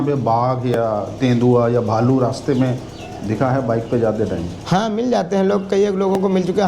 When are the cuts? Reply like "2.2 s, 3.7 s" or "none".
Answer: none